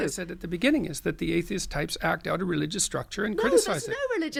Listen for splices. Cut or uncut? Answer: uncut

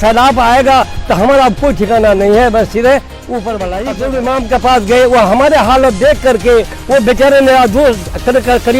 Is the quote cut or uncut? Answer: cut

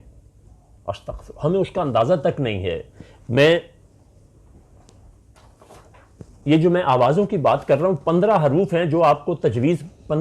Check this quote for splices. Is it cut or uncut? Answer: uncut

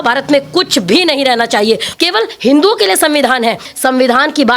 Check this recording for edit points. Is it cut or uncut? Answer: cut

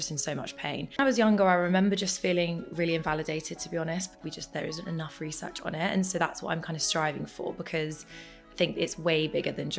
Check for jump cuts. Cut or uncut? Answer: cut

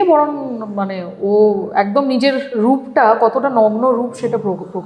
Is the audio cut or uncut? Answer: uncut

